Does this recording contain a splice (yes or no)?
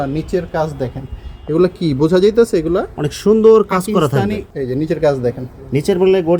yes